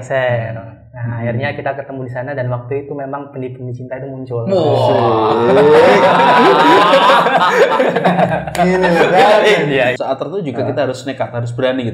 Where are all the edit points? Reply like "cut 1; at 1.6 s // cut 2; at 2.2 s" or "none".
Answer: cut 1; at 10.0 s